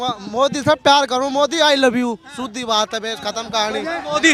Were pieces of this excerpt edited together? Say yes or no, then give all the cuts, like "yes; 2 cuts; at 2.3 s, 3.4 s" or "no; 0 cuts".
no; 0 cuts